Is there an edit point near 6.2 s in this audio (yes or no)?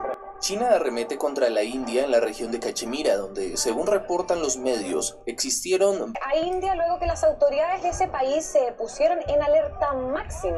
yes